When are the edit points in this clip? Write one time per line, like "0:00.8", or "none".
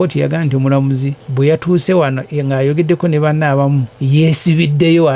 0:01.2
0:03.9